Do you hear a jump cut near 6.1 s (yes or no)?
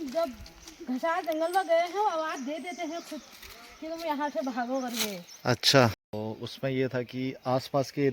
yes